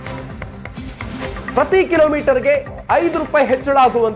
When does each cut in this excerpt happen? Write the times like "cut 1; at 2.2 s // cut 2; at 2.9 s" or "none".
cut 1; at 1.5 s